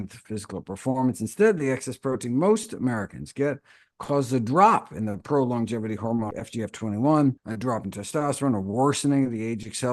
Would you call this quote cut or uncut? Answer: cut